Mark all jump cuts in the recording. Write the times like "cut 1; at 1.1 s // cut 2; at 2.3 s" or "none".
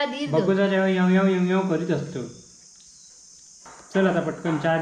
cut 1; at 3.7 s